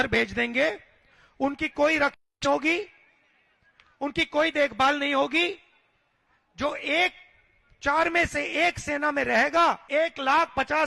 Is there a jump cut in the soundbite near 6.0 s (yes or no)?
no